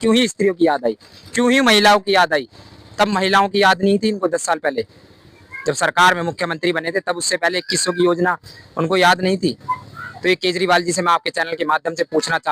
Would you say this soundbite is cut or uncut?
uncut